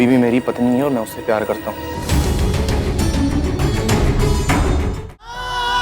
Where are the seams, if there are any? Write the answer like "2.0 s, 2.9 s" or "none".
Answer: 4.9 s